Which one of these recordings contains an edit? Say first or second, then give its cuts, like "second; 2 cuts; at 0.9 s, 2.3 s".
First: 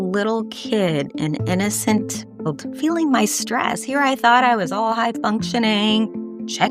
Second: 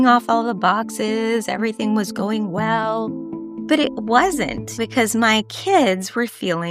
second; 1 cut; at 4.8 s